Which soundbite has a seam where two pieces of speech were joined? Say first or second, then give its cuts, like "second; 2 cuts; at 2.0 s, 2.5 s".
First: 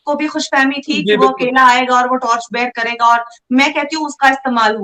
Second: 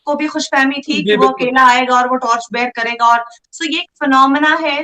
second; 1 cut; at 3.4 s